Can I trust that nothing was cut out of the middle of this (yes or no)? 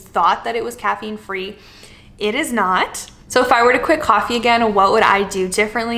yes